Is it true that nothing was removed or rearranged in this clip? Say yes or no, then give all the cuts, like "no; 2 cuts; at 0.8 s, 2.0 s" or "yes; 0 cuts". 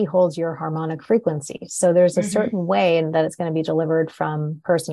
yes; 0 cuts